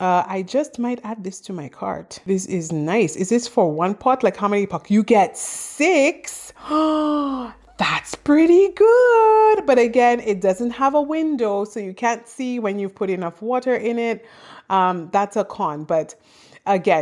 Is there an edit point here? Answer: no; 0 cuts

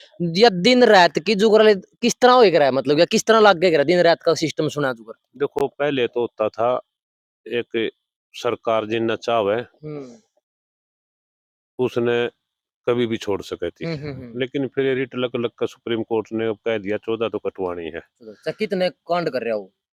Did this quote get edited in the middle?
no; 0 cuts

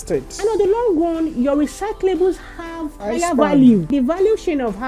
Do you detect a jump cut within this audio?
yes; 2 cuts; at 3.0 s, 3.9 s

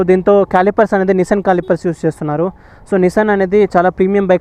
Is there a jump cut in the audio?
no; 0 cuts

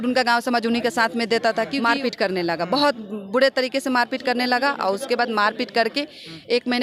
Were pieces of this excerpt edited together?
yes; 1 cut; at 1.8 s

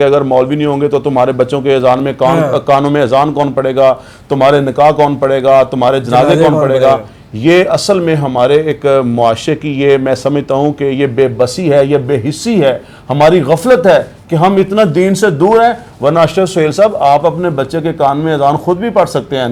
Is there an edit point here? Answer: no; 0 cuts

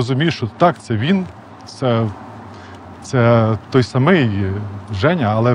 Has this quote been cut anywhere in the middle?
no; 0 cuts

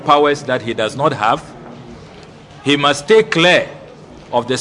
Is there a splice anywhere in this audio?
no; 0 cuts

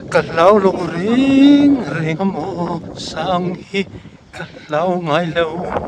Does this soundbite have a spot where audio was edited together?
no; 0 cuts

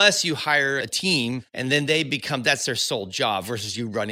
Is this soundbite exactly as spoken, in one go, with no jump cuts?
no; 1 cut; at 1.5 s

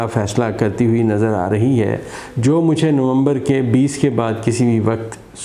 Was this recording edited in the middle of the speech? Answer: no; 0 cuts

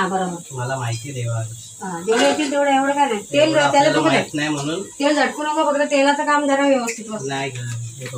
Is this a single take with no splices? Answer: yes; 0 cuts

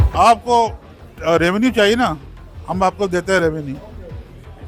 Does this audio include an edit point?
no; 0 cuts

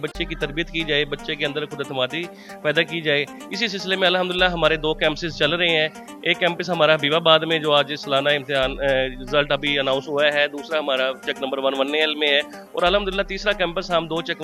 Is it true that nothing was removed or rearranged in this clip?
yes; 0 cuts

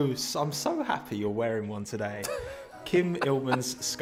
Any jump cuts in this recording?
no; 0 cuts

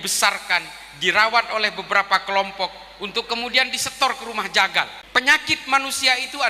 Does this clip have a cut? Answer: yes; 1 cut; at 5.0 s

